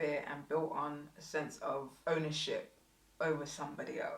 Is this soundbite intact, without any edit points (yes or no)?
no